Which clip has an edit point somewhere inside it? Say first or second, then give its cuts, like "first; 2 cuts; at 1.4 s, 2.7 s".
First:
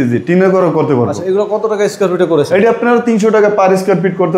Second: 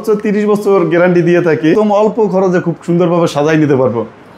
second; 1 cut; at 1.7 s